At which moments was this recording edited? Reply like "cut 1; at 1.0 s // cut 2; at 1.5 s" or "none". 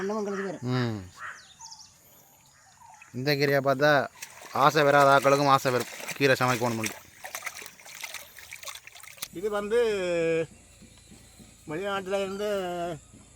cut 1; at 9.3 s